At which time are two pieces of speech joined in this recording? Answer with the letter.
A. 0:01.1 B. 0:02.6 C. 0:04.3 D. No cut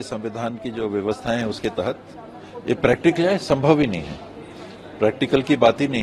D